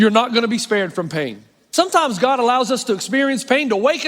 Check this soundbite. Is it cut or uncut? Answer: cut